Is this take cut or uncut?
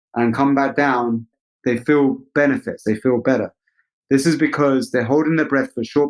cut